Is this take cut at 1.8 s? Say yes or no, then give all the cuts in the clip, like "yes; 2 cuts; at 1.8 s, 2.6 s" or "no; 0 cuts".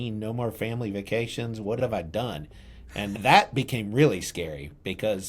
yes; 2 cuts; at 1.8 s, 3.2 s